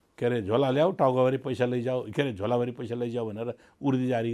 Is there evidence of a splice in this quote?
no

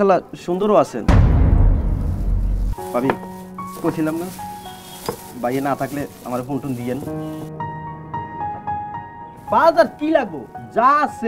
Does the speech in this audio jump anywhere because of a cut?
yes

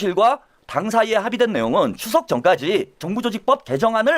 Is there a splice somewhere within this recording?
yes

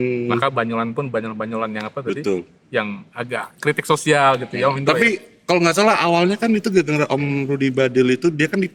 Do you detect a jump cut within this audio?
no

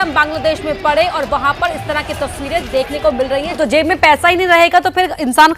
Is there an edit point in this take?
yes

